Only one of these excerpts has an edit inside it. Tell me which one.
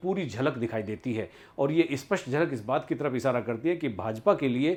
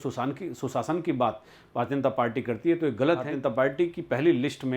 second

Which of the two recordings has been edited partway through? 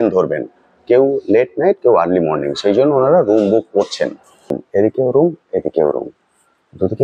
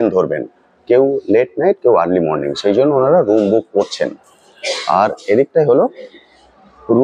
first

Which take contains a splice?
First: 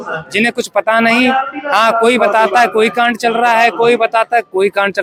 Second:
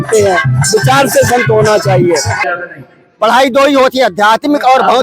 second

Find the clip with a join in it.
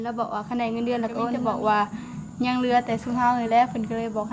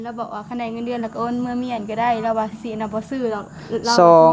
first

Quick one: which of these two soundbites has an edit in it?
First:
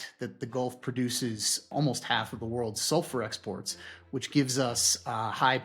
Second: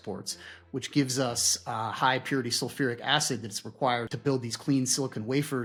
first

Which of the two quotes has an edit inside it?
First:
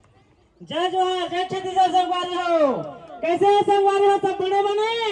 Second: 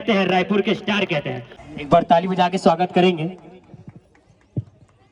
second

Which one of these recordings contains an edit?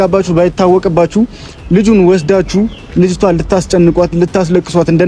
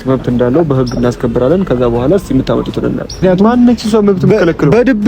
second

